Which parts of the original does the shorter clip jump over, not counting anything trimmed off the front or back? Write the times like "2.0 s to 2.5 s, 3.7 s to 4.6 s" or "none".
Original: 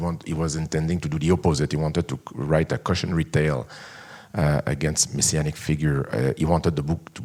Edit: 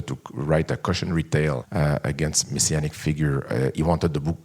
3.7 s to 4.3 s